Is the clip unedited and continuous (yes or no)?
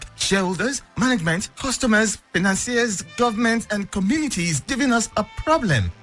yes